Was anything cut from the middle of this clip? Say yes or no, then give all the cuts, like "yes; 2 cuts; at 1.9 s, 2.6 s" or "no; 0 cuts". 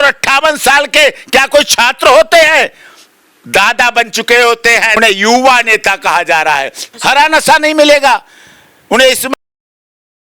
yes; 2 cuts; at 5.0 s, 6.9 s